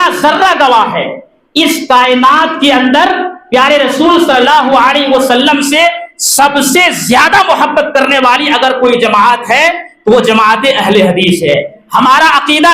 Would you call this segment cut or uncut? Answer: cut